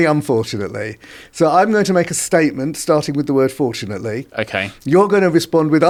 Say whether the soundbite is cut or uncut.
uncut